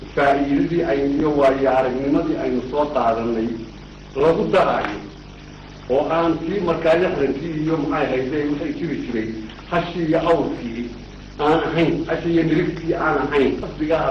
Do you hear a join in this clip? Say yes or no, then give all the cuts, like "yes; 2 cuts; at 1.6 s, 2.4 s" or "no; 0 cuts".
no; 0 cuts